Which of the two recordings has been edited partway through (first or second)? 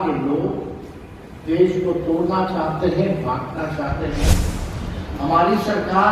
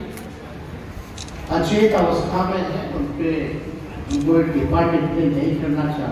first